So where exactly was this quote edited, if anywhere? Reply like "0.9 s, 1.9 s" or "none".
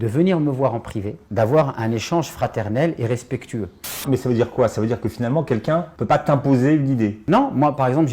3.9 s, 5.9 s, 7.2 s